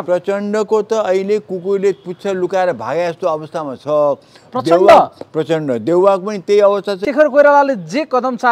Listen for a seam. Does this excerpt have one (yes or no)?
yes